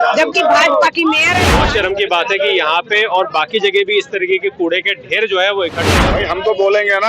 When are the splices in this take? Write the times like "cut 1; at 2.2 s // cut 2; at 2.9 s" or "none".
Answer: cut 1; at 1.4 s // cut 2; at 6.0 s